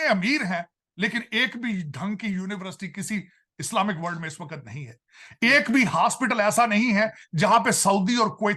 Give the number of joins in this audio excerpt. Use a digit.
0